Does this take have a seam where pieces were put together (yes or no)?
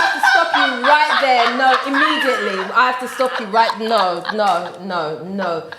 no